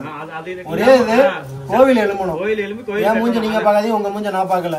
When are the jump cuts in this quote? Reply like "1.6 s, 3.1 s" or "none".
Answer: none